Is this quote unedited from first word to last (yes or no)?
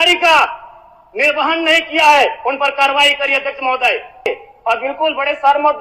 no